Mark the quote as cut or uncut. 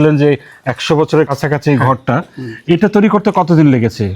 cut